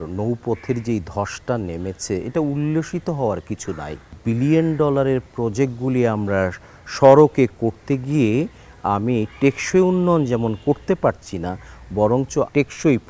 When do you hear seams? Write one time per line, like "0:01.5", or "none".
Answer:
none